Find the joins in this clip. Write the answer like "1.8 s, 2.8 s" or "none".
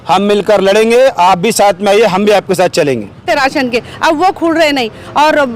3.3 s